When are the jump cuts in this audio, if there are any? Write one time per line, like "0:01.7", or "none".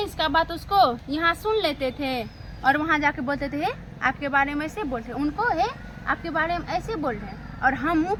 none